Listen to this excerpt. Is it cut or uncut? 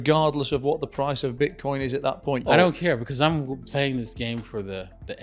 cut